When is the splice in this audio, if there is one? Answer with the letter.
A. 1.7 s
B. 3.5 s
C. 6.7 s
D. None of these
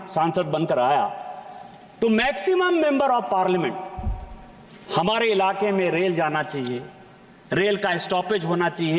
D